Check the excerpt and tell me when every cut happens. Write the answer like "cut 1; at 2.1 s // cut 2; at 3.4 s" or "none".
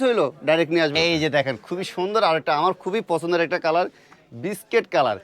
cut 1; at 0.9 s